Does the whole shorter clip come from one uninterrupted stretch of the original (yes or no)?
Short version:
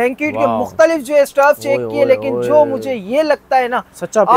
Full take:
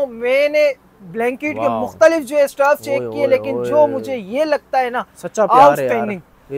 yes